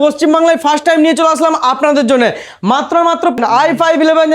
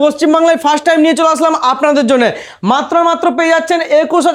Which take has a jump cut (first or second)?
first